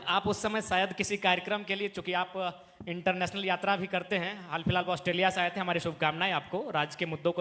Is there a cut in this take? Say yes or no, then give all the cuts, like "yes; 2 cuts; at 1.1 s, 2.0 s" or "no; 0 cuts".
no; 0 cuts